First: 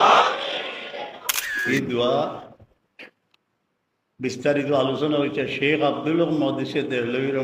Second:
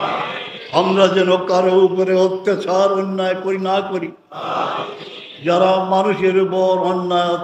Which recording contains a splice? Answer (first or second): first